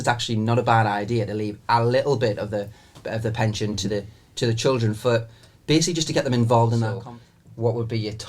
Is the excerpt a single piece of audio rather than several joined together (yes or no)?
no